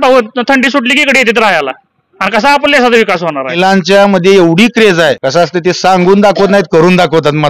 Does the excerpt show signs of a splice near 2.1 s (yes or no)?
no